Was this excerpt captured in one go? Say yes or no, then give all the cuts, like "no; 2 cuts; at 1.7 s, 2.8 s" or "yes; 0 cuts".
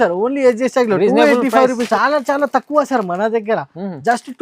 no; 1 cut; at 1.8 s